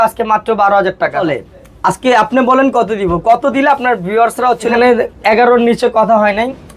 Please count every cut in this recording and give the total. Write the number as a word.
two